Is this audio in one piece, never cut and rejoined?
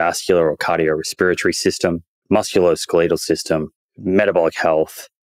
yes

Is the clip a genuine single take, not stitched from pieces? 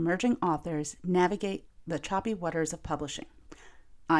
no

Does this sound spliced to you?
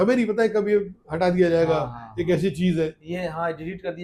no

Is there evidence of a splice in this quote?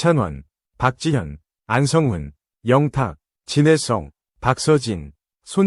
no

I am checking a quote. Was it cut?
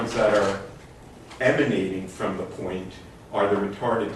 no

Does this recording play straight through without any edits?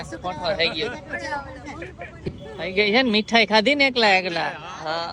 no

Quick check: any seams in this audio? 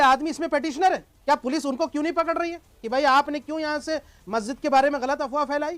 yes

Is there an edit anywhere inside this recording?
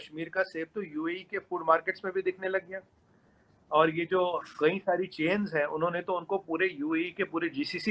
no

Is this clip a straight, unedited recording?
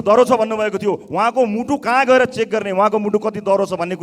yes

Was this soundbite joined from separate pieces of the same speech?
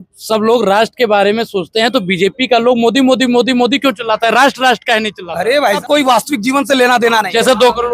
yes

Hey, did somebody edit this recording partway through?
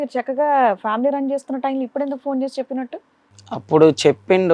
no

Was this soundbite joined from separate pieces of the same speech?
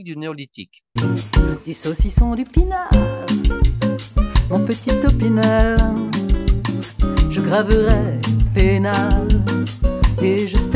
yes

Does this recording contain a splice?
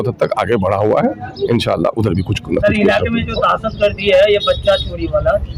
no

